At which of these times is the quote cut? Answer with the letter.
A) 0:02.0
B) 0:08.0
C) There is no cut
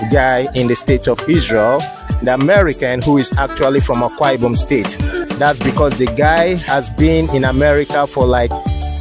C